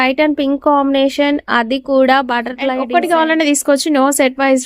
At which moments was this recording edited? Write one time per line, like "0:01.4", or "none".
0:02.8